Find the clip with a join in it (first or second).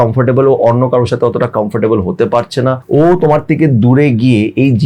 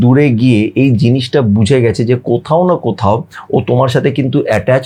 first